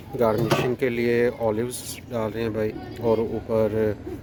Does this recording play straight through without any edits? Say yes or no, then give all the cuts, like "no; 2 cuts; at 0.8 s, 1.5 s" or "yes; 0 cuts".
yes; 0 cuts